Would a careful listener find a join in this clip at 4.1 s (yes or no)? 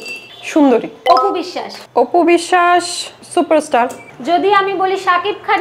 no